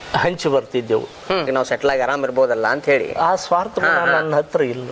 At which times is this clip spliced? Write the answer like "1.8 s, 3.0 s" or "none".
1.5 s